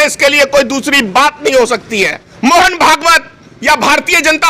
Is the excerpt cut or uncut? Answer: cut